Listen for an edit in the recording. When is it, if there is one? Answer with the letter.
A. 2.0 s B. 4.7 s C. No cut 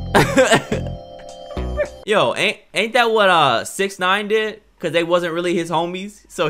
A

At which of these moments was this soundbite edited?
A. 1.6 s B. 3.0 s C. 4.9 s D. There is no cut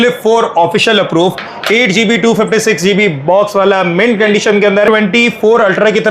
C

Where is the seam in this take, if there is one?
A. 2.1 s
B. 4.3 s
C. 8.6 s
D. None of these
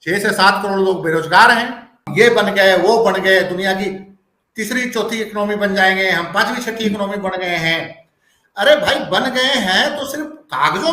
A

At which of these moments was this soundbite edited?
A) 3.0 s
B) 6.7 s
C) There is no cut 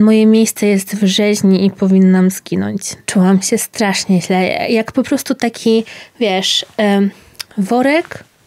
A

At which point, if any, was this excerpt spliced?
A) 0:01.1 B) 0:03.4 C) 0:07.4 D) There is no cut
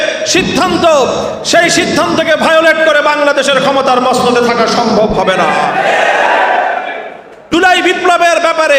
C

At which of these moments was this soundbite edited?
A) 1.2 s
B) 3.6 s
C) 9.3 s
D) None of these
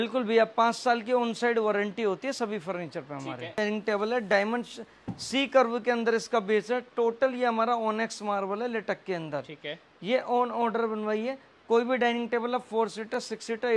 B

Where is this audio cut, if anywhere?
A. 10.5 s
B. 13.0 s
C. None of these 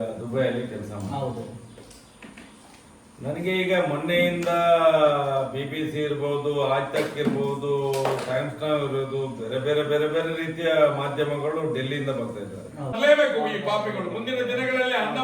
B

